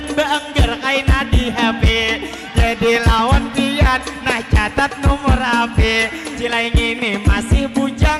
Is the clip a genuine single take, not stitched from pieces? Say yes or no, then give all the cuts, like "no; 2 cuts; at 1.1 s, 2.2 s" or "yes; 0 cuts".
no; 1 cut; at 6.3 s